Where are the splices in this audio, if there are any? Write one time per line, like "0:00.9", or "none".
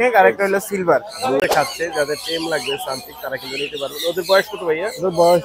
0:01.4

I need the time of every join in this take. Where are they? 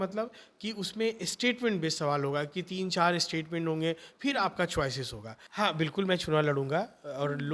0:05.4

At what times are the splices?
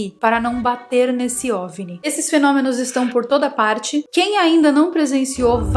0:02.0

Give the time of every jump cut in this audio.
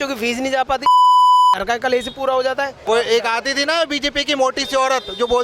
0:02.8

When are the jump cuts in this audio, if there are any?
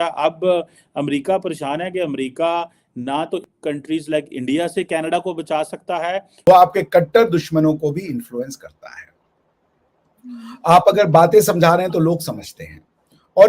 0:06.5

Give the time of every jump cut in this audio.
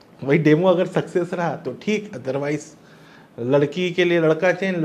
none

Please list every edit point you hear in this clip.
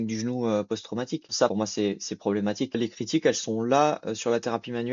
0:01.4
0:02.8

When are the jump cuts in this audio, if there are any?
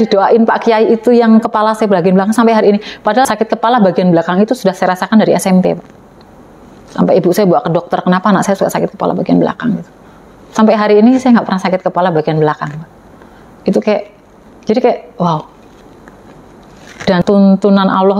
0:03.3
0:17.2

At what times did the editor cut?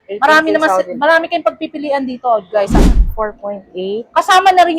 0:02.8

